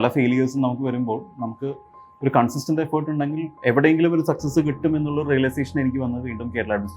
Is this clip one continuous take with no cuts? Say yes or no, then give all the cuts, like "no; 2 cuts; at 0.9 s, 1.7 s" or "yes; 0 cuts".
yes; 0 cuts